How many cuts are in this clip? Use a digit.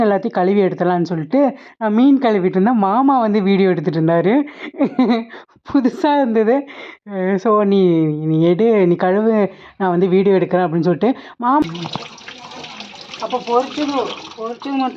1